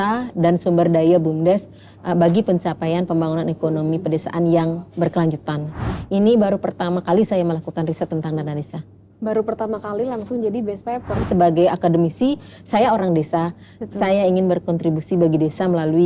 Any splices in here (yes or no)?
yes